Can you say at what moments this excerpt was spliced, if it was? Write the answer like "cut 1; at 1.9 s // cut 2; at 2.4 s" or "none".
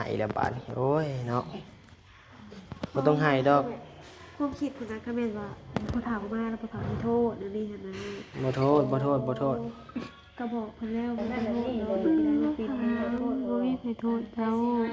cut 1; at 11.7 s